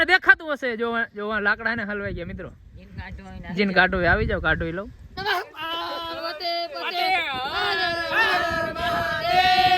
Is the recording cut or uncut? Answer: cut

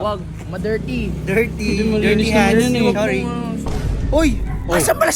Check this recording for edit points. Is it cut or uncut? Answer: cut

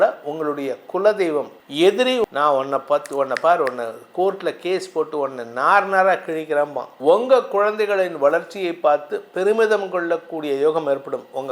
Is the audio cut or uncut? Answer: cut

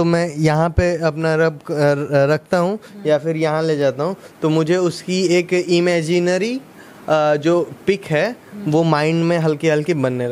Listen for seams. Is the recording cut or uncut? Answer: uncut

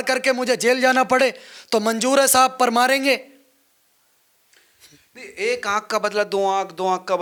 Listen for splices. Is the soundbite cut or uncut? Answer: uncut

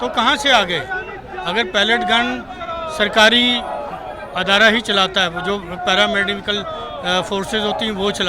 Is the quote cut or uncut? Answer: uncut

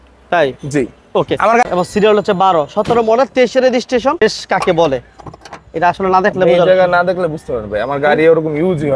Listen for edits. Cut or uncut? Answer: cut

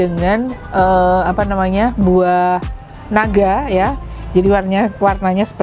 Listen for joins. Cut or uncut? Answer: uncut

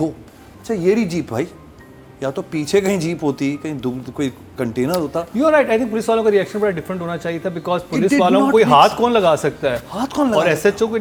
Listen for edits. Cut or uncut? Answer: uncut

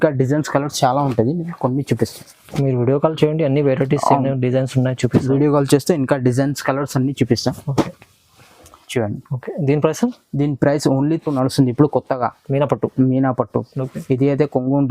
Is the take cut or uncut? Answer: cut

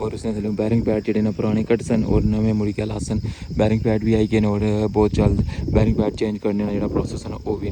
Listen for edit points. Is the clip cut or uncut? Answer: uncut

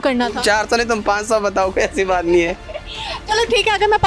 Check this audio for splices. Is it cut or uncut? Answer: uncut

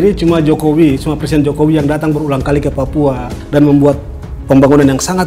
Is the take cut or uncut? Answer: uncut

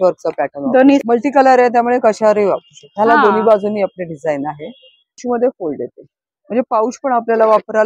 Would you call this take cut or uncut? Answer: cut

